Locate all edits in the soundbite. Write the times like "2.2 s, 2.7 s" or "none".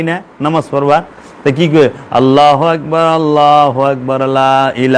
none